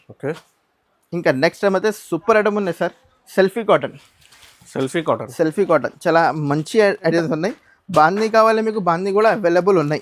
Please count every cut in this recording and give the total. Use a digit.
1